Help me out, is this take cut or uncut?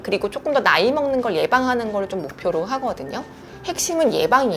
cut